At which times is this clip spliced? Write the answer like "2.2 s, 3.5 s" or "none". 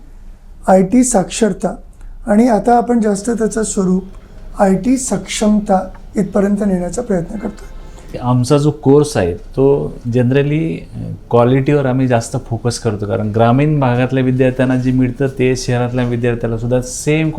8.2 s